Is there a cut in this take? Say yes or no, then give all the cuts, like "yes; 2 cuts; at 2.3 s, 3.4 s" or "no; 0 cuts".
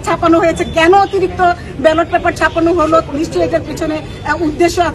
no; 0 cuts